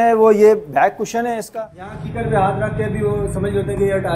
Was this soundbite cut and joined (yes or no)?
yes